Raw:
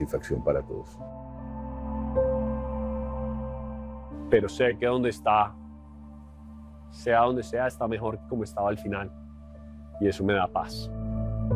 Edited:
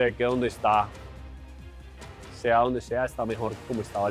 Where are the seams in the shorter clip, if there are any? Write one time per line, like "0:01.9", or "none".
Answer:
none